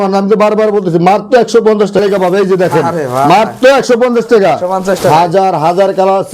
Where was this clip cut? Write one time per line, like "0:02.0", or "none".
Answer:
0:02.0